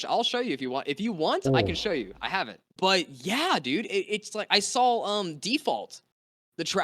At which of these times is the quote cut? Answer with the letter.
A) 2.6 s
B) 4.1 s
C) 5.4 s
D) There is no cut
A